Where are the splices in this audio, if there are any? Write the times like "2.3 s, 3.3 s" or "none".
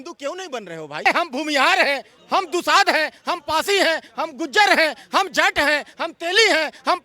1.0 s